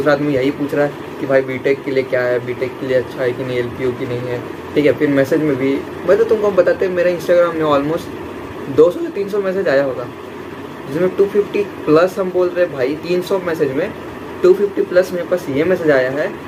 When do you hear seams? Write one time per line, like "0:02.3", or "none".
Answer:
none